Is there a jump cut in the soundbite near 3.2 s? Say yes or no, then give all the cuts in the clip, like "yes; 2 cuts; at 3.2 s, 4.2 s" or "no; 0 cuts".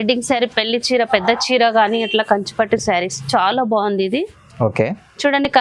no; 0 cuts